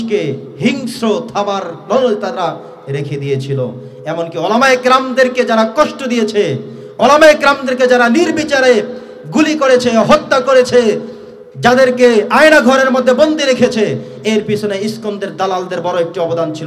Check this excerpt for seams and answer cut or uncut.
uncut